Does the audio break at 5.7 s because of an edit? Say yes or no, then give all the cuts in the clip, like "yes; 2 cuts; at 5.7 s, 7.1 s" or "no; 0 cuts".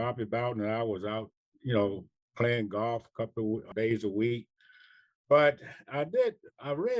no; 1 cut; at 3.7 s